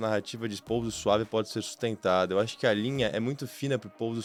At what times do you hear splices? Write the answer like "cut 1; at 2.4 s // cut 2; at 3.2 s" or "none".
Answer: none